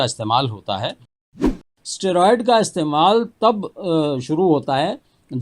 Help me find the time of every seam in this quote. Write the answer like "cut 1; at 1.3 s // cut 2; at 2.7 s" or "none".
cut 1; at 1.5 s